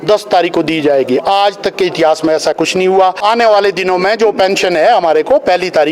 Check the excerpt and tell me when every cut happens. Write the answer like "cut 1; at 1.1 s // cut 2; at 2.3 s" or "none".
cut 1; at 3.2 s